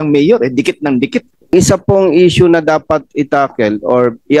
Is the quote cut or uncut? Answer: cut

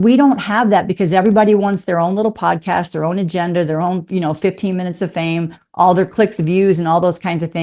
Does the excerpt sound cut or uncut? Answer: uncut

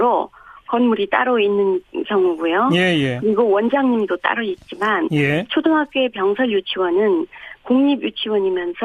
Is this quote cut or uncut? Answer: uncut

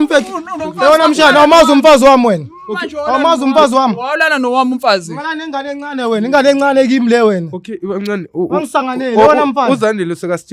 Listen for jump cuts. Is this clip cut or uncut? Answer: uncut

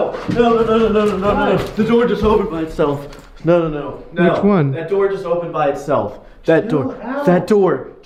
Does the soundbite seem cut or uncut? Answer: uncut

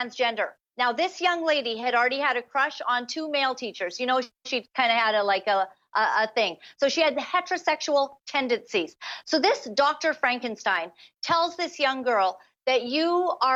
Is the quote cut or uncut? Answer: uncut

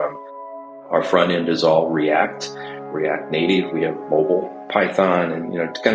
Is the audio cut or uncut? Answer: cut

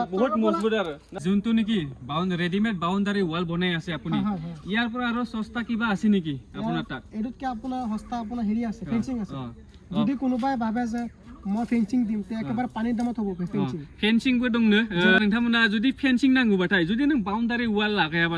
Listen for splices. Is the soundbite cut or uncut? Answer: cut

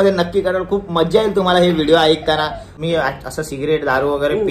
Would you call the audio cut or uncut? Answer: cut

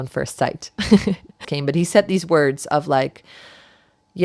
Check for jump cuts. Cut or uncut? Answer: cut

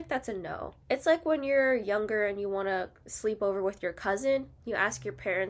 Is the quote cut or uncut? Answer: uncut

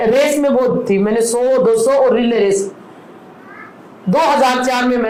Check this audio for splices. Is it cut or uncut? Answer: uncut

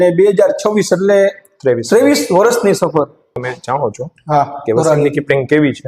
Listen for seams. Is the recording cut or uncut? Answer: cut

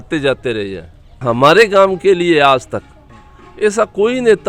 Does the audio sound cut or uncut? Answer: cut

